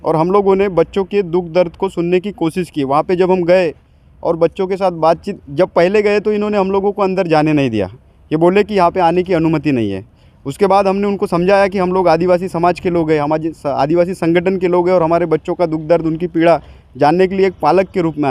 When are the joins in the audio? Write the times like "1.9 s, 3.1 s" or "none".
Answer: none